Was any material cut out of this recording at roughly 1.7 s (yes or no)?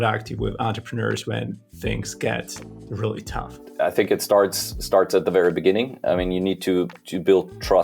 no